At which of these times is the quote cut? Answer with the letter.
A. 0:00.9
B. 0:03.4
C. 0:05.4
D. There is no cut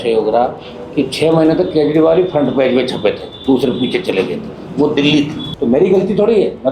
C